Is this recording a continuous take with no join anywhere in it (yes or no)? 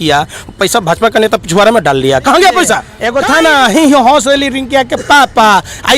no